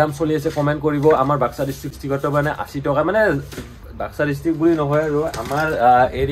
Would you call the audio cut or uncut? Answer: cut